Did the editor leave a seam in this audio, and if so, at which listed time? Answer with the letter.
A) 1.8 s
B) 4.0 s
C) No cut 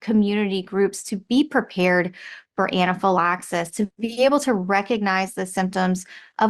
B